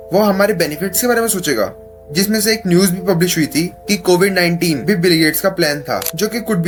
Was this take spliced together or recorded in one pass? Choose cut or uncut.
uncut